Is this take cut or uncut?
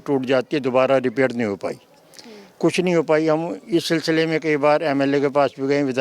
uncut